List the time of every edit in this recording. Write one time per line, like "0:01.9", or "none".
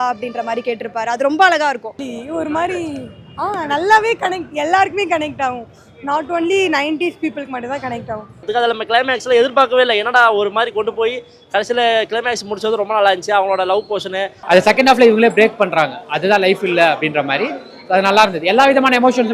0:02.1
0:08.4
0:14.3